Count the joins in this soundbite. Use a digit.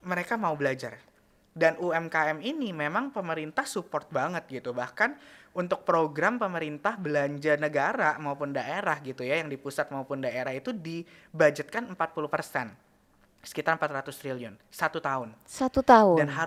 0